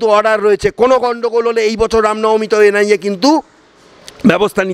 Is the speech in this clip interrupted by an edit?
no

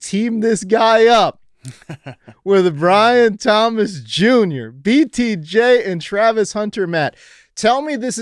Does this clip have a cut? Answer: no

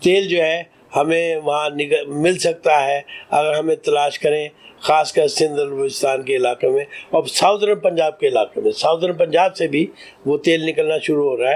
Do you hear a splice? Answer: no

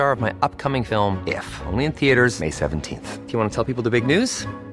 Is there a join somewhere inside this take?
no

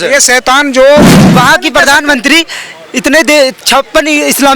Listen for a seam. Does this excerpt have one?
yes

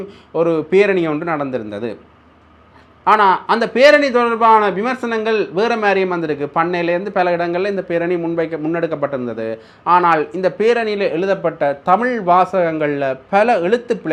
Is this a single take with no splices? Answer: yes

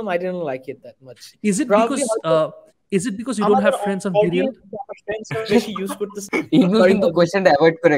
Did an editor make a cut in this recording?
yes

